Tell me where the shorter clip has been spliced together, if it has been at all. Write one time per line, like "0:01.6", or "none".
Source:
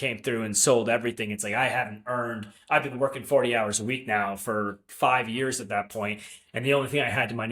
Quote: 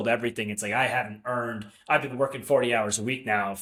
none

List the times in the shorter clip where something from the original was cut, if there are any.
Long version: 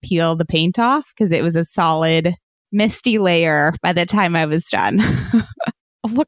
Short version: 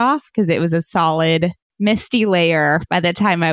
0:01.6

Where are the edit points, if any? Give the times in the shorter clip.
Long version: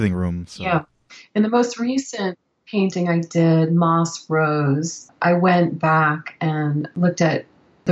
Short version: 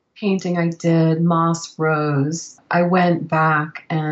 none

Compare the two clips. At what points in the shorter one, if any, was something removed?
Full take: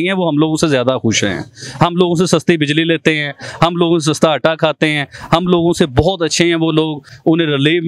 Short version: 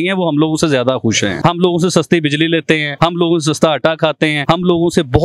0:01.3
0:02.9
0:04.4

